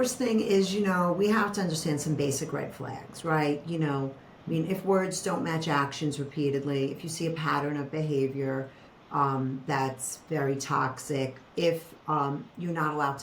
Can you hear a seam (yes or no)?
no